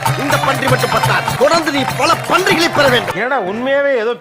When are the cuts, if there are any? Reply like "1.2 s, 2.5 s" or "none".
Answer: 1.3 s, 3.1 s